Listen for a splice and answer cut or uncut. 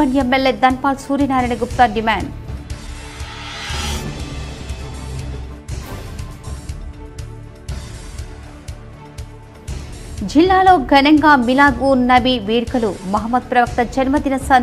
uncut